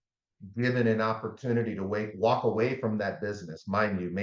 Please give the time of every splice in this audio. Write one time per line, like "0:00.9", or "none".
none